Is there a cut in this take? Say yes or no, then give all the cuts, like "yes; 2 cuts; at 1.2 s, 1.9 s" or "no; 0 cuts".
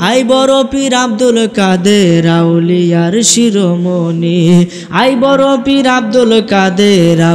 no; 0 cuts